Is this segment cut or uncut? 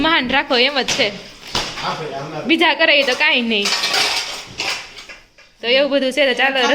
uncut